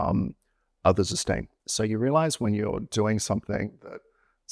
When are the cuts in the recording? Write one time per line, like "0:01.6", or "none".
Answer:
0:01.5